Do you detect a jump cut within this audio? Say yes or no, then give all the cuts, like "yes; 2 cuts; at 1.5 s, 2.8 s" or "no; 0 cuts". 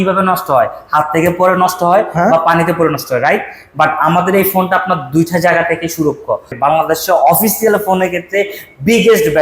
yes; 1 cut; at 6.5 s